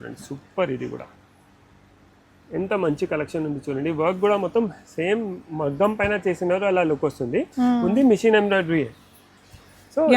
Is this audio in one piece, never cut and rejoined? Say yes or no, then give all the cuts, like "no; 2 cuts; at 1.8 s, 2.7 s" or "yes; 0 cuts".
yes; 0 cuts